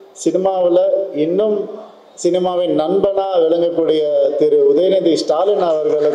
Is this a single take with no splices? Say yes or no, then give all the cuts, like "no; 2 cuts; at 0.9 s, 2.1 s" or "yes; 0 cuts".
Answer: yes; 0 cuts